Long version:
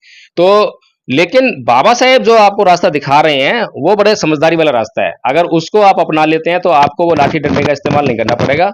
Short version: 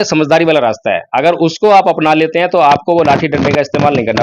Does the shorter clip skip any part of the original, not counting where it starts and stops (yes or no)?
no